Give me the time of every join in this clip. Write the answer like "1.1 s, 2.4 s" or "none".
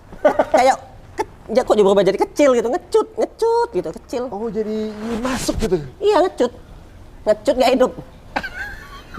none